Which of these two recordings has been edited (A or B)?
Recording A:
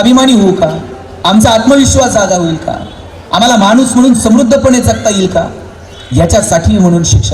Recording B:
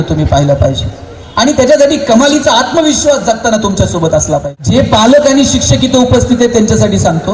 B